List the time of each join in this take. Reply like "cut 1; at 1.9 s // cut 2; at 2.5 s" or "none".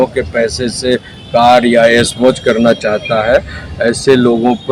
none

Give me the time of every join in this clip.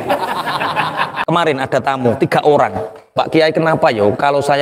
cut 1; at 1.2 s // cut 2; at 3.1 s

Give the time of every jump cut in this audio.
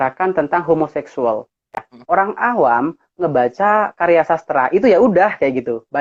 cut 1; at 1.9 s

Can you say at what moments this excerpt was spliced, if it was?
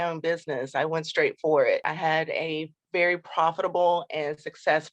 cut 1; at 1.8 s

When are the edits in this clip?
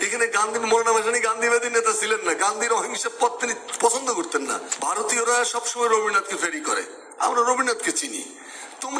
cut 1; at 4.7 s

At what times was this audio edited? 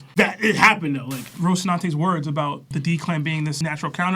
cut 1; at 1.3 s

